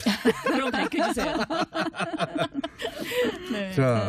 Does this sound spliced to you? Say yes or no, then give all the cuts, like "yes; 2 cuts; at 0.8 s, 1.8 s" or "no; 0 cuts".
yes; 1 cut; at 2.4 s